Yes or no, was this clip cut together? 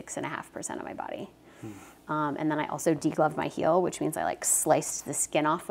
no